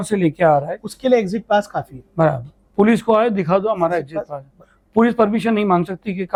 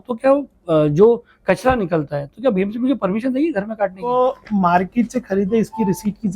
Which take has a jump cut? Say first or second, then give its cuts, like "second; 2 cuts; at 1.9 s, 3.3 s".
second; 1 cut; at 4.1 s